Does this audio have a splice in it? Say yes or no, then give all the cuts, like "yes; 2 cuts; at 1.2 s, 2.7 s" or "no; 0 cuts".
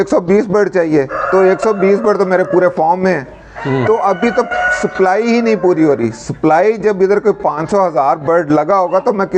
no; 0 cuts